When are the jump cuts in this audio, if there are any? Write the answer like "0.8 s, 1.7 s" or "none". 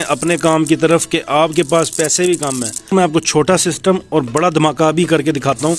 2.9 s